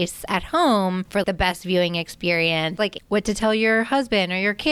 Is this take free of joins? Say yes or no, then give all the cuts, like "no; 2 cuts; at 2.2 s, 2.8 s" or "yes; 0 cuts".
no; 2 cuts; at 1.2 s, 2.8 s